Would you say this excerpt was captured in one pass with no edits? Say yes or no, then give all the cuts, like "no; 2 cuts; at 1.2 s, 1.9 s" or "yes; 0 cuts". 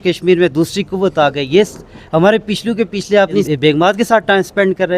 no; 1 cut; at 3.8 s